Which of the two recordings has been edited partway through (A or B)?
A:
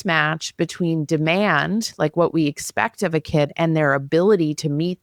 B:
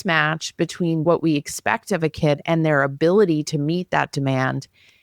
B